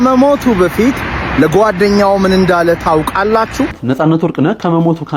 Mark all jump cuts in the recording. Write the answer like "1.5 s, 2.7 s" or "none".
3.8 s